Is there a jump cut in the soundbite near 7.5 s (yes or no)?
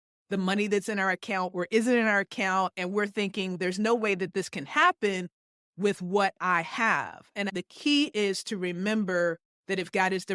yes